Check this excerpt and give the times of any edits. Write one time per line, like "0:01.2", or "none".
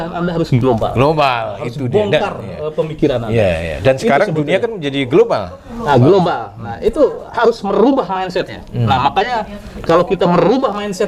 none

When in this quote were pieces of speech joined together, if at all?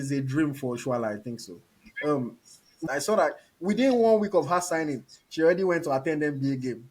0:02.7

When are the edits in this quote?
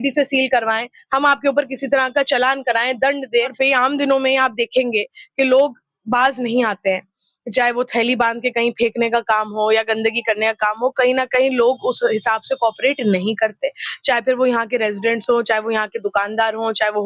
0:03.5

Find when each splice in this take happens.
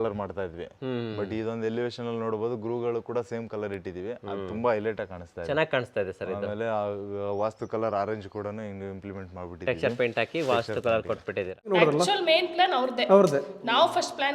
0:11.7

